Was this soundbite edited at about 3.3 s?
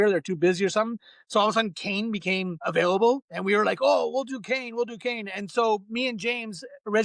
yes; 2 cuts; at 2.6 s, 3.3 s

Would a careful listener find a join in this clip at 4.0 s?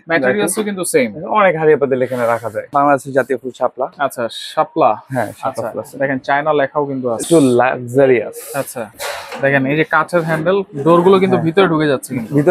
no; 3 cuts; at 2.7 s, 7.2 s, 9.0 s

